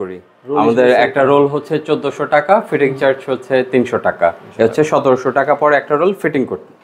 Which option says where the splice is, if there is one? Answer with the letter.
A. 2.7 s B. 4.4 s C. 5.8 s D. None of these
D